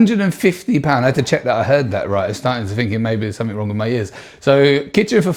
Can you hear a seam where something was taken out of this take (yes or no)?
no